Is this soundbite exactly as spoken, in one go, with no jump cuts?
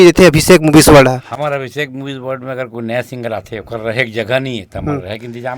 yes; 0 cuts

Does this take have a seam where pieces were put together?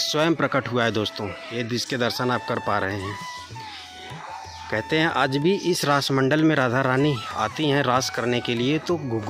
no; 0 cuts

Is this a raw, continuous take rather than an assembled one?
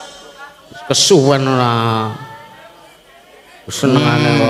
yes; 0 cuts

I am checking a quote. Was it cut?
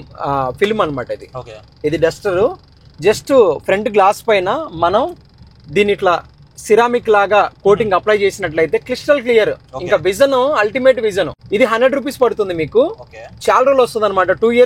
yes; 1 cut; at 11.4 s

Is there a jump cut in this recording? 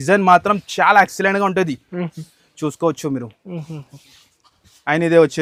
no; 0 cuts

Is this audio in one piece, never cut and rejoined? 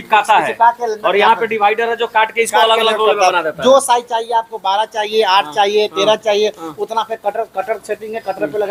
yes; 0 cuts

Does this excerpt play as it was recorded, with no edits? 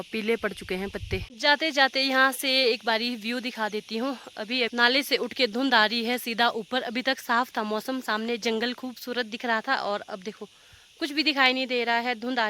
yes; 0 cuts

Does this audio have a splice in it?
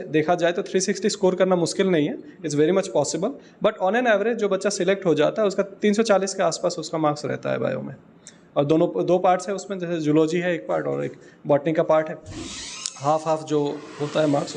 no; 0 cuts

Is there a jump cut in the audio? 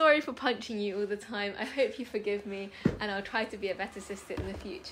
no; 0 cuts

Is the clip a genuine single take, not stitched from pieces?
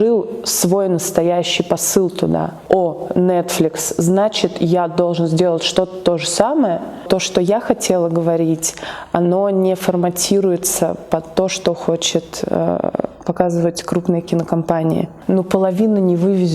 no; 3 cuts; at 2.6 s, 7.0 s, 15.1 s

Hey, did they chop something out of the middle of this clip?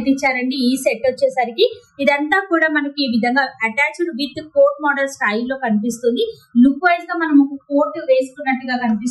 no; 0 cuts

